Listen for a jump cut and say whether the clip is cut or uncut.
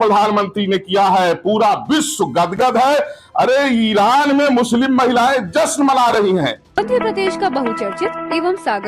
cut